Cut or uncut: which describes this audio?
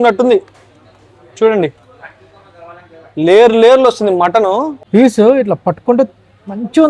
cut